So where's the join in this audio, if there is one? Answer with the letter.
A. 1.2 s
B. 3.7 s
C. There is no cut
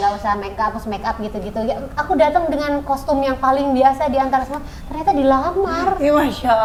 C